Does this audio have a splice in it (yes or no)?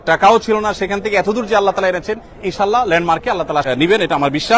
yes